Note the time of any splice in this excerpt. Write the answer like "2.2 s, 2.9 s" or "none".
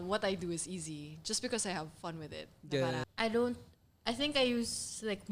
3.0 s